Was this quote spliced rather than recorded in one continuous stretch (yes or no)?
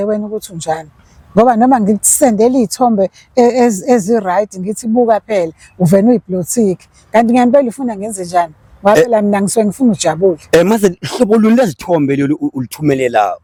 no